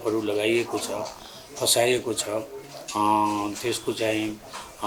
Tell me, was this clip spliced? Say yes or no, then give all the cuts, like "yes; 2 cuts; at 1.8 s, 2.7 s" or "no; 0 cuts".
no; 0 cuts